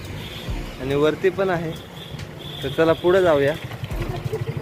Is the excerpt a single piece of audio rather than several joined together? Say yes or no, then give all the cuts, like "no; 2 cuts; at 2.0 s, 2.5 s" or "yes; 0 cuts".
yes; 0 cuts